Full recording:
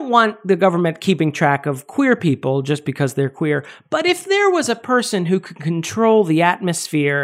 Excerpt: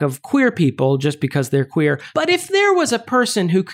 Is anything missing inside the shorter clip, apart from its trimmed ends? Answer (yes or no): yes